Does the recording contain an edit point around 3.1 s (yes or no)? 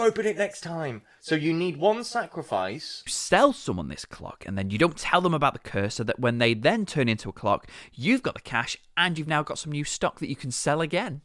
yes